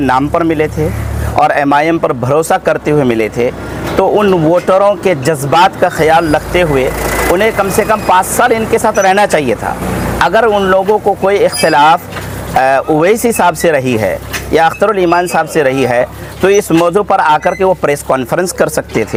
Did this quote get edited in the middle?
no; 0 cuts

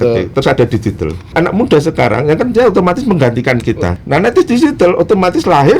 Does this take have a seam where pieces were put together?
yes; 2 cuts; at 1.3 s, 3.9 s

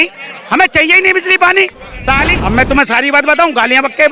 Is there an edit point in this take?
yes; 1 cut; at 2.3 s

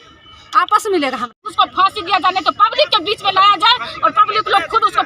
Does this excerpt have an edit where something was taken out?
yes; 1 cut; at 1.5 s

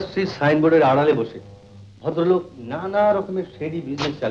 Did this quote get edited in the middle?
no; 0 cuts

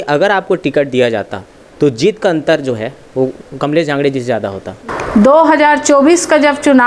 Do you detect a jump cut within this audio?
yes; 1 cut; at 4.7 s

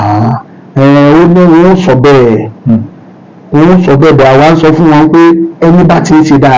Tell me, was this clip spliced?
no; 0 cuts

